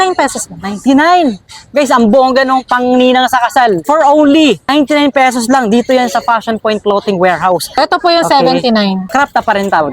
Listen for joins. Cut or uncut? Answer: cut